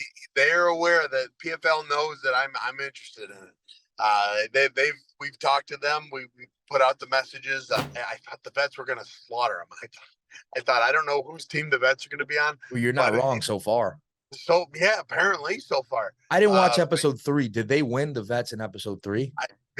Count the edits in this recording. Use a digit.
1